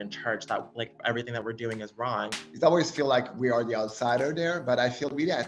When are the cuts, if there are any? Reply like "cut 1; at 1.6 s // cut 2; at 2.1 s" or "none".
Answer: cut 1; at 2.4 s